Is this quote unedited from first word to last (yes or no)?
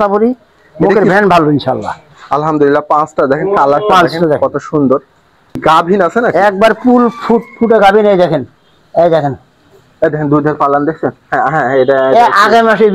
no